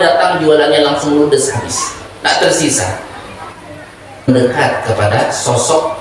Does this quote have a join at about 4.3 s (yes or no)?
yes